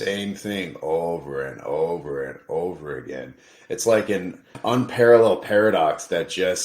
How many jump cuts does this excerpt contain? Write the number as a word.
one